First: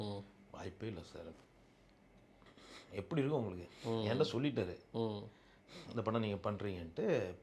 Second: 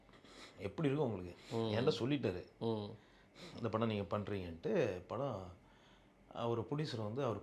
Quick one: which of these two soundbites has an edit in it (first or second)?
first